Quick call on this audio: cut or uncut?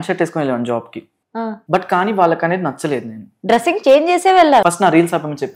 cut